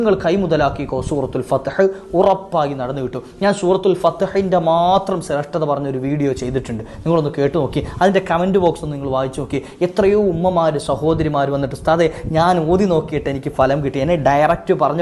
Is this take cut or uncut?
uncut